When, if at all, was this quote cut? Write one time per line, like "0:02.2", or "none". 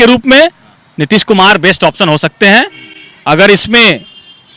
none